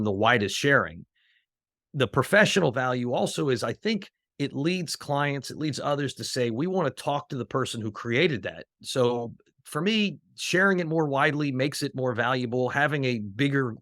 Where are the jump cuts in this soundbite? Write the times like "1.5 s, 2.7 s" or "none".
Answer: 8.8 s